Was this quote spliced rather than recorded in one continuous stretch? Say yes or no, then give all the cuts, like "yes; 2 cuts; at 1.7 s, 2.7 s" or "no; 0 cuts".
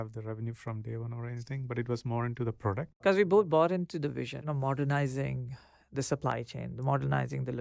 yes; 2 cuts; at 3.0 s, 4.4 s